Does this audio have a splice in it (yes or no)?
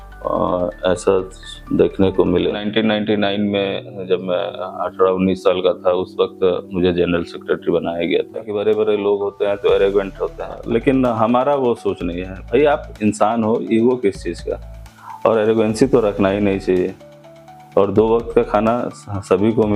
yes